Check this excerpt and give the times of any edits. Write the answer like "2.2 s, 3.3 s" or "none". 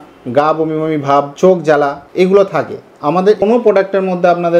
1.3 s, 2.0 s, 3.4 s